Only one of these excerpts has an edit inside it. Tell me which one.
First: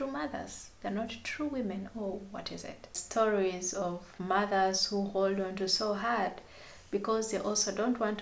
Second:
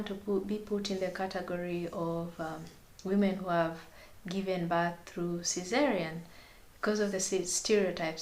first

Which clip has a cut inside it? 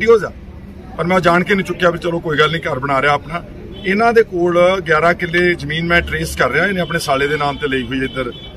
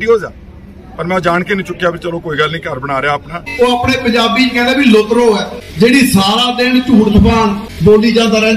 second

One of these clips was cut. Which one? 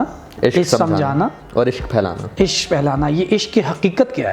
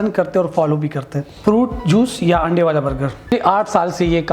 second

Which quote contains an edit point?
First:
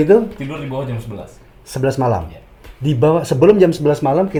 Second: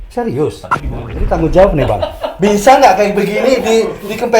second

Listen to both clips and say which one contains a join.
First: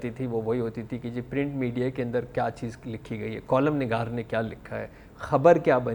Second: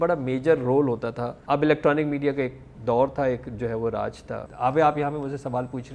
second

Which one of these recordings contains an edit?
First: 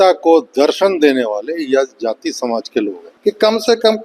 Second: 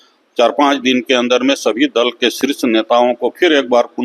first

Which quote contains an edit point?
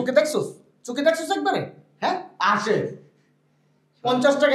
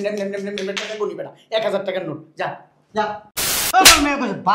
second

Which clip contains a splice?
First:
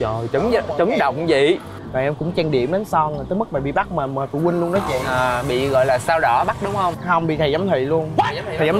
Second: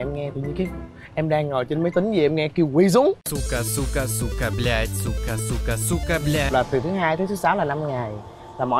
second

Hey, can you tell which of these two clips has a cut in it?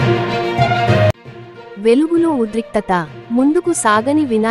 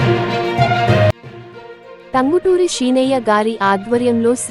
second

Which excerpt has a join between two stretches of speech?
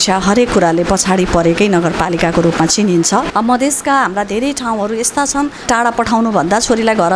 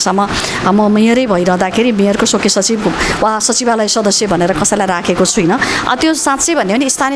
first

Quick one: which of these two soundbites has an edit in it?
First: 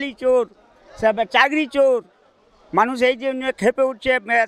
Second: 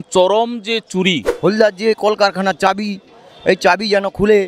second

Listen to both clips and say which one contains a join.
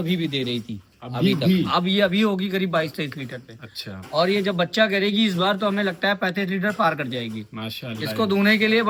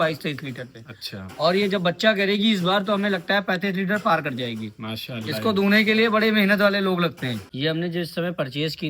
second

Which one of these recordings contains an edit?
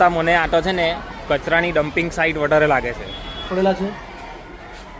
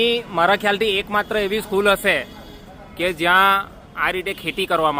first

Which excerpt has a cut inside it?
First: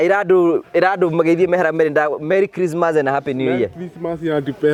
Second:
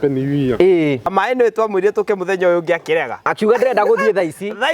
second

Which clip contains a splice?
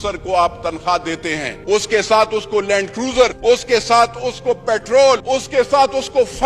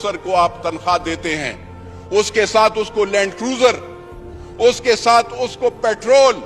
first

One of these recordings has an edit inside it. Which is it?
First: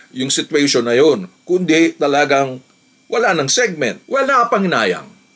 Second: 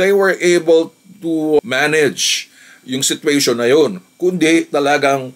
first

